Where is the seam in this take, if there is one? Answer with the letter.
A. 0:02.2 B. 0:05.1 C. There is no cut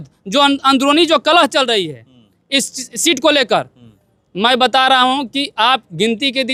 C